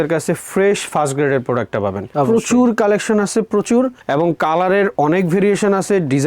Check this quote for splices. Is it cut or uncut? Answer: cut